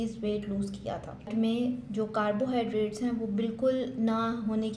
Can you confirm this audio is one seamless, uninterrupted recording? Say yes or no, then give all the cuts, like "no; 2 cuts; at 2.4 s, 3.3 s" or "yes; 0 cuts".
no; 1 cut; at 1.3 s